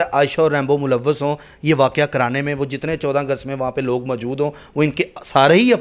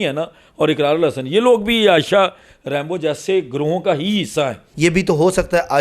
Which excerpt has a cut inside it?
second; 1 cut; at 4.6 s

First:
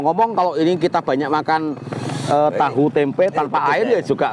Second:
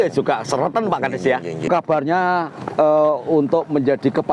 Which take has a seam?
second; 1 cut; at 1.7 s

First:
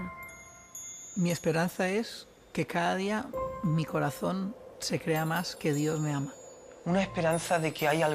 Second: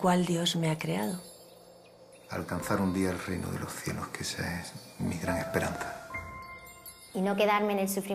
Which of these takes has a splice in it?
second; 1 cut; at 4.0 s

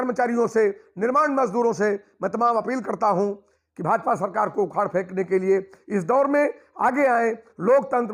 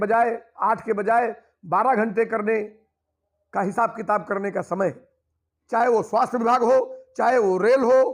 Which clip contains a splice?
second; 1 cut; at 5.6 s

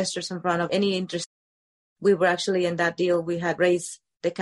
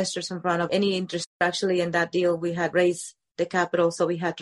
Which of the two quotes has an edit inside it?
second; 1 cut; at 1.4 s

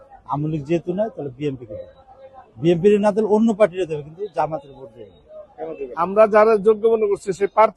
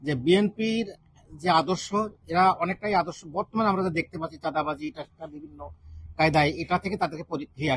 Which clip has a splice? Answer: first; 1 cut; at 5.9 s

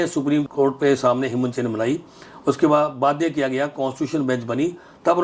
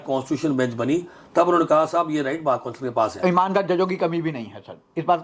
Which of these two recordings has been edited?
second; 1 cut; at 3.1 s

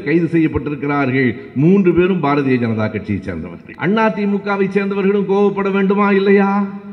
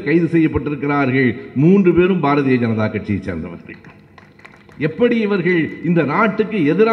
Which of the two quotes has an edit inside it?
first; 1 cut; at 3.6 s

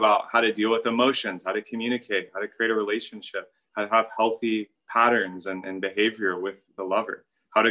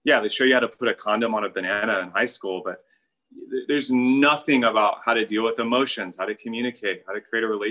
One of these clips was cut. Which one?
first; 2 cuts; at 4.8 s, 6.7 s

